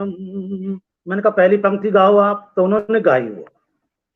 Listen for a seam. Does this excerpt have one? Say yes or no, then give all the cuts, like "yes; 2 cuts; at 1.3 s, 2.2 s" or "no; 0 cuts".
yes; 1 cut; at 0.9 s